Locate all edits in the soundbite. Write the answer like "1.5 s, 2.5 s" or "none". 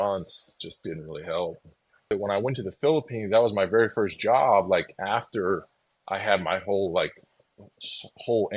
2.1 s